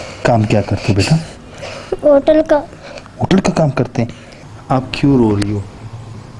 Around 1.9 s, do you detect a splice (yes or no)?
no